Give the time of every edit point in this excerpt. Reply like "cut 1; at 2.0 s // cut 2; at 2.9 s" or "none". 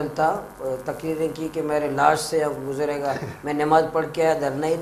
none